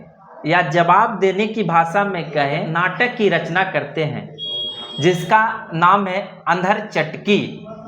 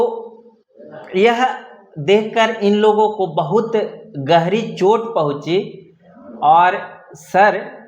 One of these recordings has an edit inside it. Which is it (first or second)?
first